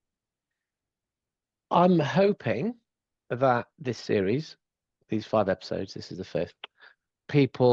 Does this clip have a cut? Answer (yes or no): no